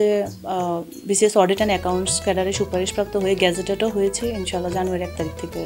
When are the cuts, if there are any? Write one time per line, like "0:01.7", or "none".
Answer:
none